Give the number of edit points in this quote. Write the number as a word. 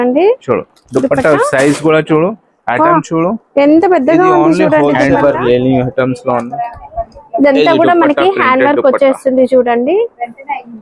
one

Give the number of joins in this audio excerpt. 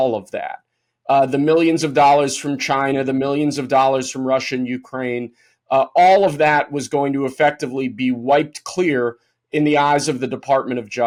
zero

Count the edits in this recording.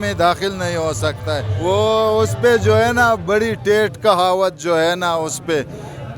one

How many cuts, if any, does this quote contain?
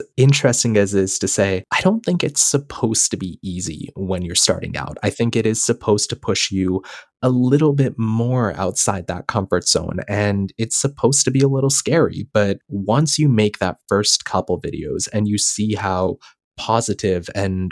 two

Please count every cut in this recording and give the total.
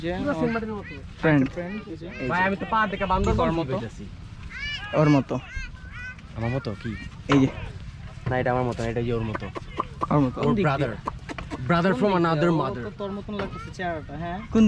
zero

